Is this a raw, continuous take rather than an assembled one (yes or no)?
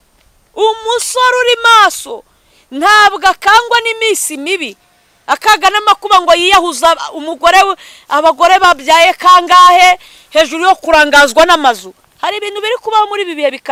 yes